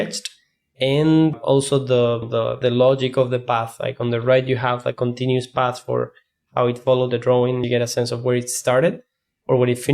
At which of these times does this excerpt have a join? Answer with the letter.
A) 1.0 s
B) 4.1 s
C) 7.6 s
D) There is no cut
C